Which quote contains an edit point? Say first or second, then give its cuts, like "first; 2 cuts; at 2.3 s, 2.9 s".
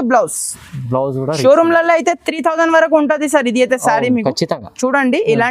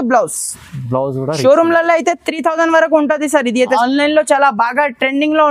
second; 1 cut; at 3.7 s